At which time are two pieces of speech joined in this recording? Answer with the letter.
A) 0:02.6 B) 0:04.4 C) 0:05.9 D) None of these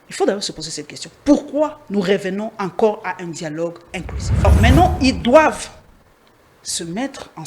B